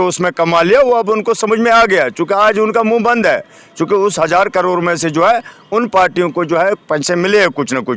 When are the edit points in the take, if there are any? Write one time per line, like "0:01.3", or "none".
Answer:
none